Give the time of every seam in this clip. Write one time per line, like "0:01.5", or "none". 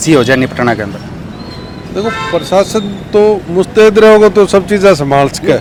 none